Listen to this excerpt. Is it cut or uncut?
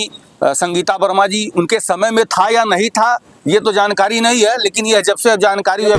uncut